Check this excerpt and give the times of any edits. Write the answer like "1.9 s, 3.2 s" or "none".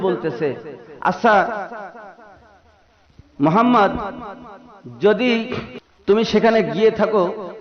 5.7 s